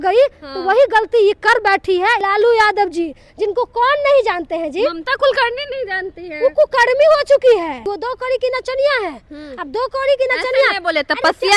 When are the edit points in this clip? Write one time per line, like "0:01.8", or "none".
0:02.2
0:07.9